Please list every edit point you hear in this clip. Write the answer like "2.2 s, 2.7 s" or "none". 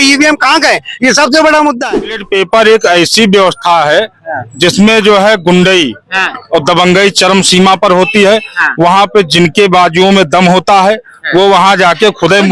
2.2 s